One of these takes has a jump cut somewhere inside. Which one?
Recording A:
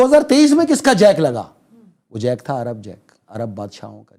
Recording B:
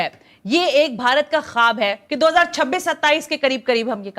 B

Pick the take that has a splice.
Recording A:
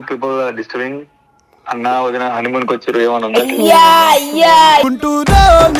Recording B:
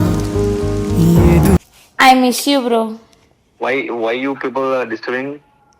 B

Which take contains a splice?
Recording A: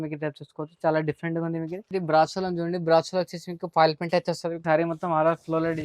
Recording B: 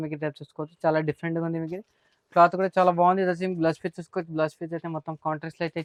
A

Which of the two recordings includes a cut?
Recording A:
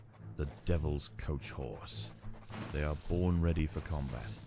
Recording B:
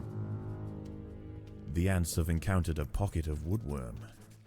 B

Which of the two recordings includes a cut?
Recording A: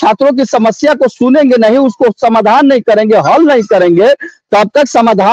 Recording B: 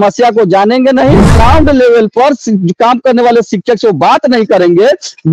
B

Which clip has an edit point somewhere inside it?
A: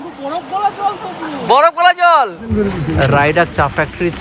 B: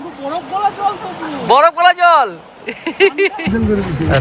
A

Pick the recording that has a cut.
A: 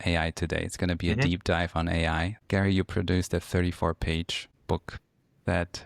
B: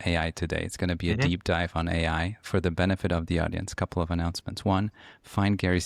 A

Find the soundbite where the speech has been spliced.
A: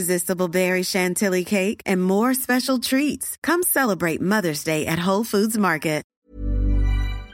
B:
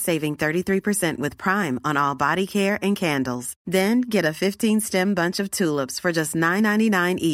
A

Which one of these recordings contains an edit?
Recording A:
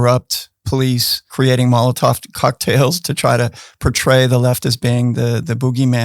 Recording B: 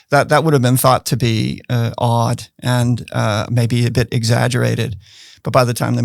A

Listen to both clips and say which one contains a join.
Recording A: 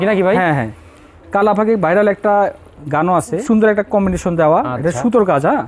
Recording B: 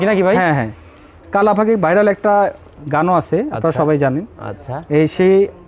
A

